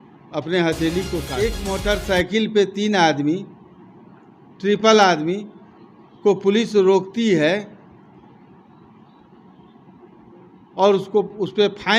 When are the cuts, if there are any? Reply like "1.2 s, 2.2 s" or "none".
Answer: 1.6 s